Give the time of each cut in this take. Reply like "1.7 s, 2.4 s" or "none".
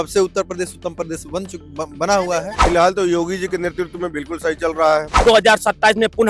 2.5 s, 5.1 s